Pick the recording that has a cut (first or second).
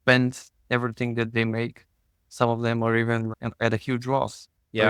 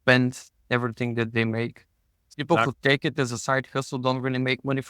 second